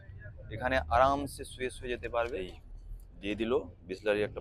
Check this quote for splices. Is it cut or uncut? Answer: cut